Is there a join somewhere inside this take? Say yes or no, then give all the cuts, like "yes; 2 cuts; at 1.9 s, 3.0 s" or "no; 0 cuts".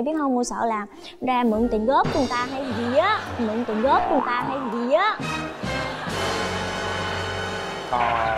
no; 0 cuts